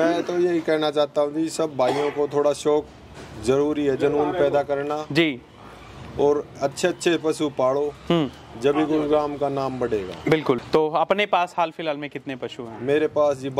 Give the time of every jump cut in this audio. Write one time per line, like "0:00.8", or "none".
0:10.6